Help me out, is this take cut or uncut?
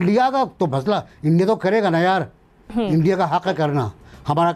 uncut